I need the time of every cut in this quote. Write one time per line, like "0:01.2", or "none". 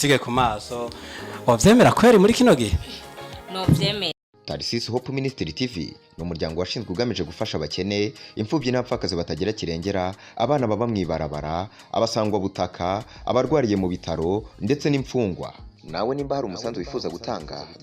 0:04.2